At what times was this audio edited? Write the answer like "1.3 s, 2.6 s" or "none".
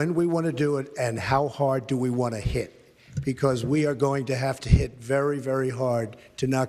none